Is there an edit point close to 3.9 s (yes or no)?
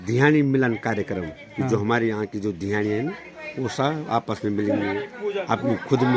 no